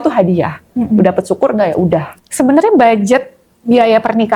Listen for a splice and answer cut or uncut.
cut